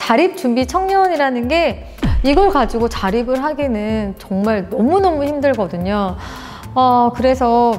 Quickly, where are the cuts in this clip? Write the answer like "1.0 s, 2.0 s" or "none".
2.0 s